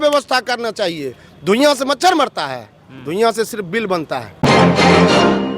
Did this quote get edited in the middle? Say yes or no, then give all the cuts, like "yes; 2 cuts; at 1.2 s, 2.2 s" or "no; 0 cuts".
yes; 1 cut; at 4.3 s